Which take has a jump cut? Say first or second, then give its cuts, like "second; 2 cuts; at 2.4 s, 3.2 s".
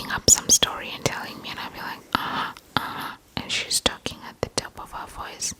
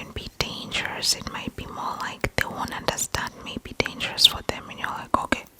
second; 1 cut; at 3.3 s